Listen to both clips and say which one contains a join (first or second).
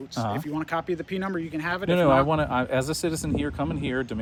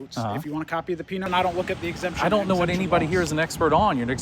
second